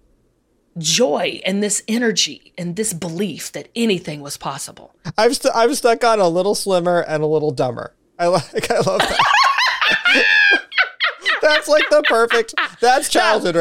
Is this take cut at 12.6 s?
no; 1 cut; at 5.1 s

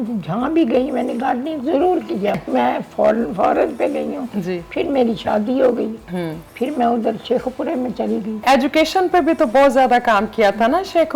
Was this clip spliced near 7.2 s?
no; 2 cuts; at 2.4 s, 8.4 s

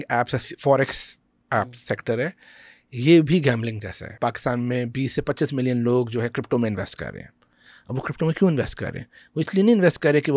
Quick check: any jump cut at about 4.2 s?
yes; 1 cut; at 4.2 s

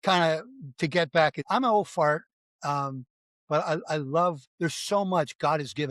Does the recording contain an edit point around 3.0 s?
no; 2 cuts; at 1.4 s, 4.5 s

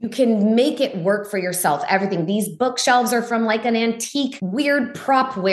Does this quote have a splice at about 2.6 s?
no; 1 cut; at 4.4 s

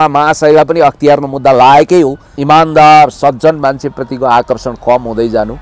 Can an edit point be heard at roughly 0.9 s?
no; 1 cut; at 2.3 s

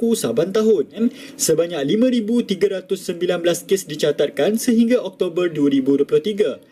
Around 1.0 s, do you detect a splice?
yes; 1 cut; at 1.0 s

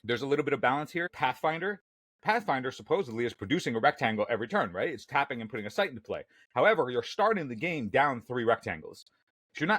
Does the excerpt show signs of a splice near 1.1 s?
yes; 1 cut; at 1.1 s

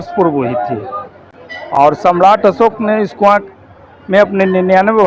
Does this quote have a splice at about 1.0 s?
no; 0 cuts

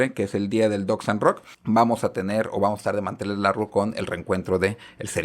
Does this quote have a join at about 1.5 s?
yes; 1 cut; at 1.5 s

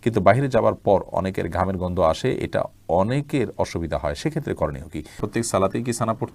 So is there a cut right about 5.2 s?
yes; 1 cut; at 5.2 s

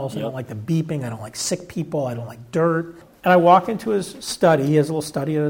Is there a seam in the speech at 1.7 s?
no; 1 cut; at 3.0 s

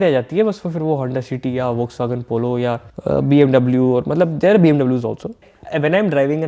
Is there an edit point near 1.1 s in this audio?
no; 2 cuts; at 2.9 s, 5.4 s

